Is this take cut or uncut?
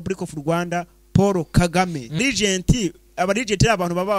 cut